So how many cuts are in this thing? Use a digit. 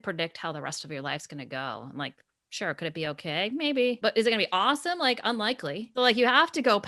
2